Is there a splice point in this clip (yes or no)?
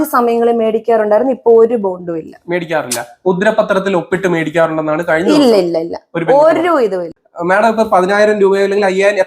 yes